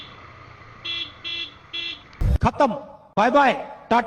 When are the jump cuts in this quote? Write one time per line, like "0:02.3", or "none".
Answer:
0:02.2